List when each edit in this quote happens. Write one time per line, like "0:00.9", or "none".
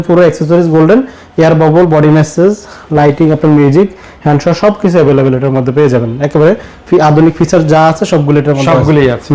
none